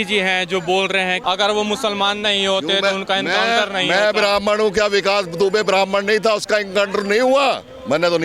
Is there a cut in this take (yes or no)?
yes